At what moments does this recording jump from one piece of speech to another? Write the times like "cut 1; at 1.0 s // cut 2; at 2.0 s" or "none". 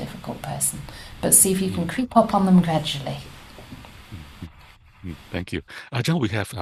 none